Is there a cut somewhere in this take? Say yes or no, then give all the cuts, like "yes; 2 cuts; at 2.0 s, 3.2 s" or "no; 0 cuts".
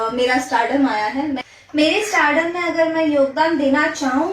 yes; 1 cut; at 1.4 s